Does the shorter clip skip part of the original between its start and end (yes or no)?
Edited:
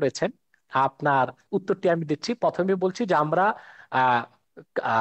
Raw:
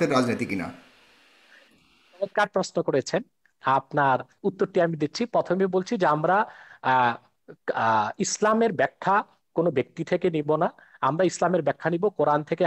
no